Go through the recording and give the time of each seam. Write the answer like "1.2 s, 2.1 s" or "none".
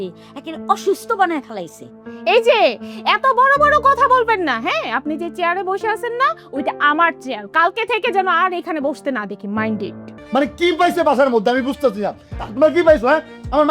10.1 s